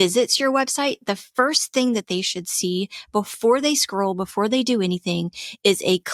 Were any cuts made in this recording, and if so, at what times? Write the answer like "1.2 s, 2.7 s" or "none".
none